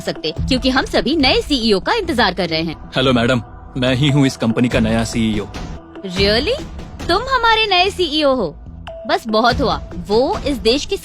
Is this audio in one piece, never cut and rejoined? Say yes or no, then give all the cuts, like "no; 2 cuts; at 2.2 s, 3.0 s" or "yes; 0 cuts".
no; 2 cuts; at 2.8 s, 5.7 s